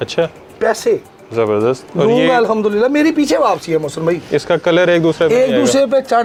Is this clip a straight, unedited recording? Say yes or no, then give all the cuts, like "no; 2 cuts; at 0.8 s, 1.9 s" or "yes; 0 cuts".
yes; 0 cuts